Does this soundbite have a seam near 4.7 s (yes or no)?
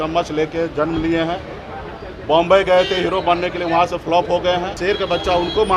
yes